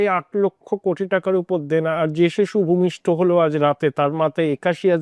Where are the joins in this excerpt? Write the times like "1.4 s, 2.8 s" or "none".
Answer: none